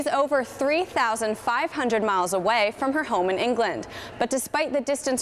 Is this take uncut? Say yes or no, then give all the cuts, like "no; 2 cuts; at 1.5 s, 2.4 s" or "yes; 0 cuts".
yes; 0 cuts